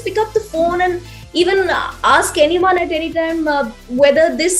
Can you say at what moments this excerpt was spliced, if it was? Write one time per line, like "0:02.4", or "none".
none

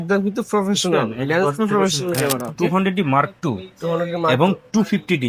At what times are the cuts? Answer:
0:02.5

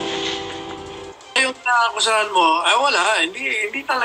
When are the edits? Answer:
0:01.4

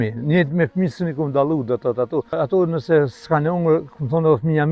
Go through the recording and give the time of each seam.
0:02.3

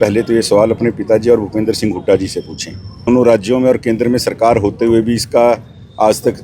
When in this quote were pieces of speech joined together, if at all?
0:03.1

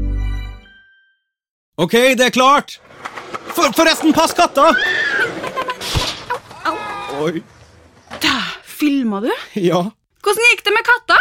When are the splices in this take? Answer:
0:01.7

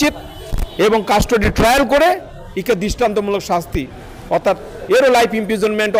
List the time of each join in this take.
none

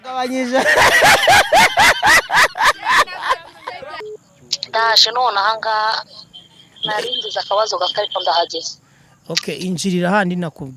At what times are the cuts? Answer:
0:03.9

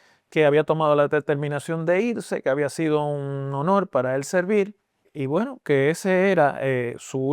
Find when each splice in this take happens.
0:05.1

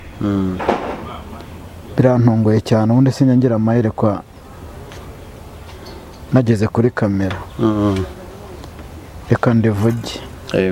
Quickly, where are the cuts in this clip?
none

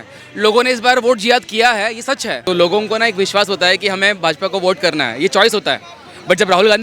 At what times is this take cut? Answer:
0:02.3

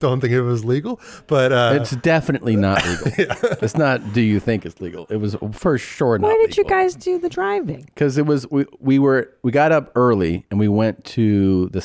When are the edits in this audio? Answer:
none

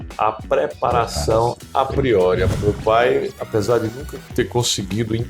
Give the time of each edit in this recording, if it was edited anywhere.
0:02.5

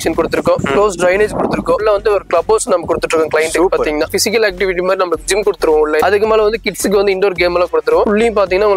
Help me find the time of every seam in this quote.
0:01.8
0:04.1
0:08.1

